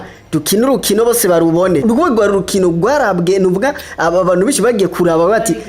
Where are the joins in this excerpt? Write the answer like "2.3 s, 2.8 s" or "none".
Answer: 1.8 s